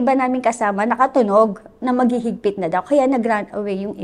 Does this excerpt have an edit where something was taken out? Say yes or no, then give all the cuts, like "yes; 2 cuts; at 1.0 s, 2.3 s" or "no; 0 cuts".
no; 0 cuts